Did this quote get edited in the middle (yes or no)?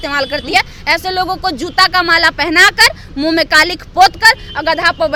no